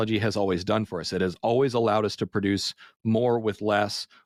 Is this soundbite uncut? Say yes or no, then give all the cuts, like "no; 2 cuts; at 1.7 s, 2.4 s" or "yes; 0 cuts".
yes; 0 cuts